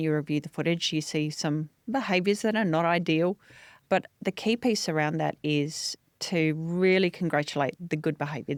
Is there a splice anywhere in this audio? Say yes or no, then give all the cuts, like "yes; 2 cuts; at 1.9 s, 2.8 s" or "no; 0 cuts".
no; 0 cuts